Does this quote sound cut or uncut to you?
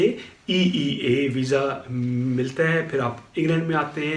uncut